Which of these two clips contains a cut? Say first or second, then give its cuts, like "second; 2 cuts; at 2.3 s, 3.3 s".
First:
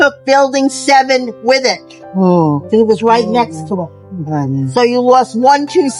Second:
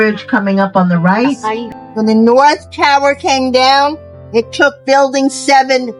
second; 1 cut; at 1.6 s